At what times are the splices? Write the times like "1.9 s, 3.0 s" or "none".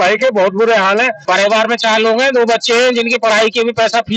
1.2 s